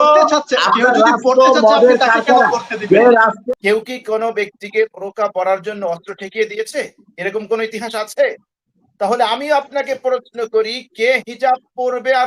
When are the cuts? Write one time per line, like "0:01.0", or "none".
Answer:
0:03.4